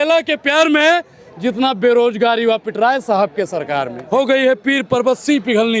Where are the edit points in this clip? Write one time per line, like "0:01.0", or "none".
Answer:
0:04.0

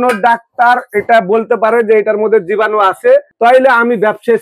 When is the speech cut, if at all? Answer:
0:03.3

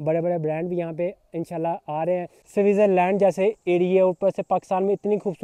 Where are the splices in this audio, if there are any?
0:02.4

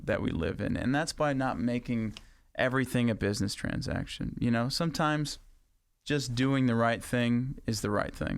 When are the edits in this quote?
none

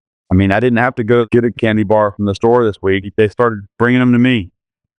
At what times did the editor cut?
0:01.3
0:03.1

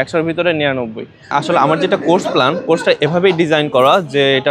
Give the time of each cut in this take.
0:01.2

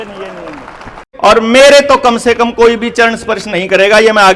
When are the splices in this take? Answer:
0:01.0

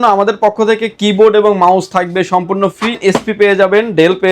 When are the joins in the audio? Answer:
0:03.0

